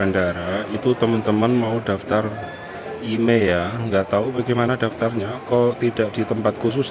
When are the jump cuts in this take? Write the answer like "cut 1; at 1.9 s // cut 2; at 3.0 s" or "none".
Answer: none